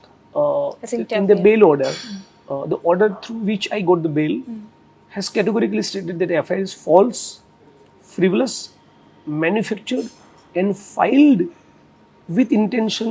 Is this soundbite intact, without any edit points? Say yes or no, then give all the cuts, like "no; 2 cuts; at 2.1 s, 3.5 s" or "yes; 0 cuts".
yes; 0 cuts